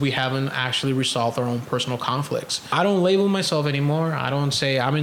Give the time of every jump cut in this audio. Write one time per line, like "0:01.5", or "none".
0:02.7